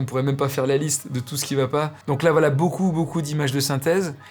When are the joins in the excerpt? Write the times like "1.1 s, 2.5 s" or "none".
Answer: none